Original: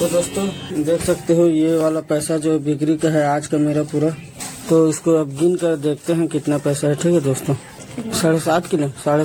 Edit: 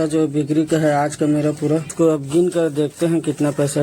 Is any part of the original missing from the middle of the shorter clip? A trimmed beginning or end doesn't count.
yes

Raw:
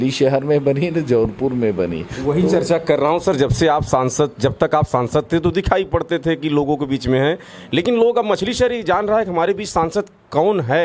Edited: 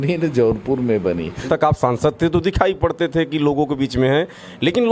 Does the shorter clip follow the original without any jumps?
no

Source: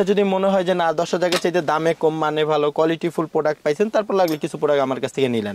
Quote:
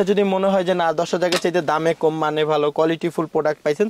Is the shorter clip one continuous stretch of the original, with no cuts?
yes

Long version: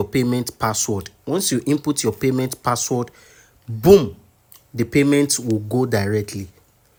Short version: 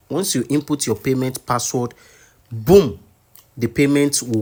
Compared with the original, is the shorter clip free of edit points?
yes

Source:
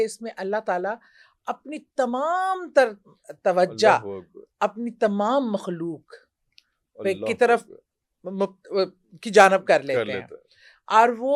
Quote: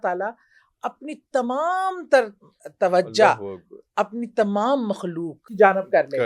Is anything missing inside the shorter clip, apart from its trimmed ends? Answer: yes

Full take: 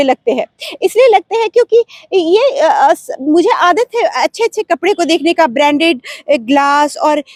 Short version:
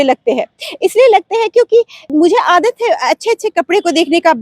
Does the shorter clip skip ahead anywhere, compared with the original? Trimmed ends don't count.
yes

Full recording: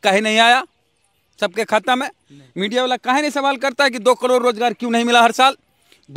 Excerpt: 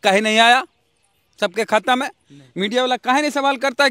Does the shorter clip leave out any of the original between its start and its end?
no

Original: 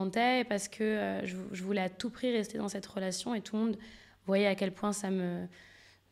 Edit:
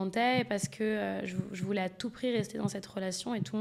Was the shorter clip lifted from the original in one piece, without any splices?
yes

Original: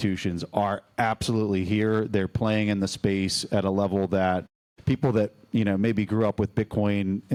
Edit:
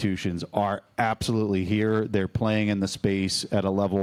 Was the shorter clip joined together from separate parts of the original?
no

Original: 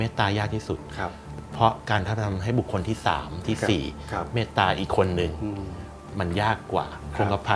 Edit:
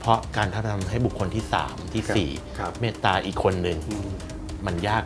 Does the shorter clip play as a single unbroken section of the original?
yes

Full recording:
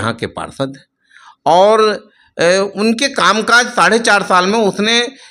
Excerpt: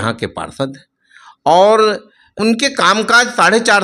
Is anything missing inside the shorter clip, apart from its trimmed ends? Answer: yes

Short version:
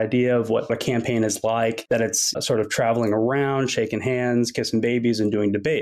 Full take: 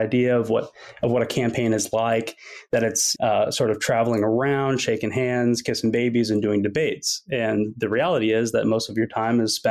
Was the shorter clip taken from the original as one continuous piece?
no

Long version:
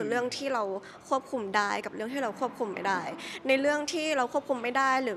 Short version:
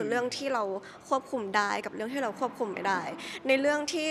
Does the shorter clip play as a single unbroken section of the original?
yes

